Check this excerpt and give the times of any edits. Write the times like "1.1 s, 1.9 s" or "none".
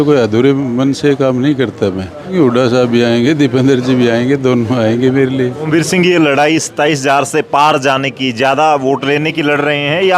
2.3 s, 5.6 s

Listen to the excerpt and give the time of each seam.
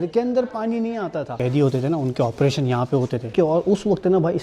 1.3 s, 3.3 s

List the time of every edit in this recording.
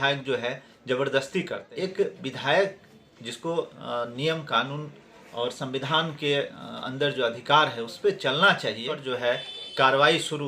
1.6 s, 9.0 s

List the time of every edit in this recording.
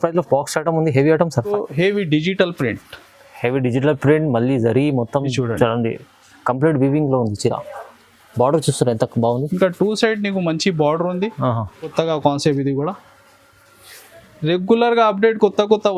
1.5 s, 11.9 s

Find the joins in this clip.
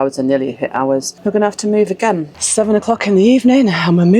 1.1 s, 2.3 s

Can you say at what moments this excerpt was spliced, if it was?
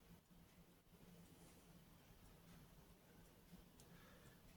none

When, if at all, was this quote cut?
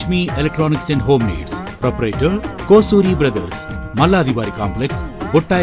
none

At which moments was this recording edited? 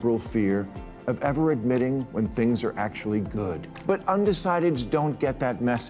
3.7 s

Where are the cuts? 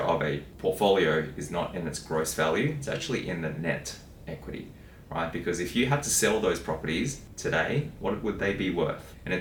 none

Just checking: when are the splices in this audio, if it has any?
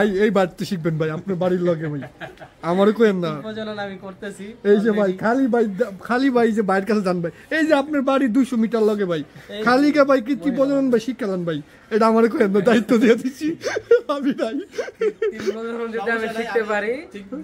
none

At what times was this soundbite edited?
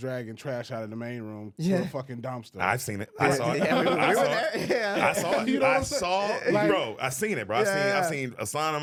none

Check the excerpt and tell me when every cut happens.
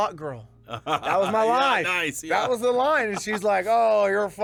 none

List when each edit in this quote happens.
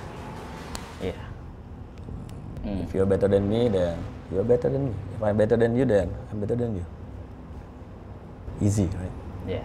0.9 s, 2.5 s

